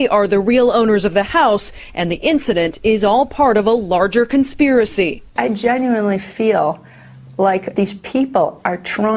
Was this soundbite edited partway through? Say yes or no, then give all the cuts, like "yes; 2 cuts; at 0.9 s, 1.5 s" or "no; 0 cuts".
yes; 1 cut; at 5.2 s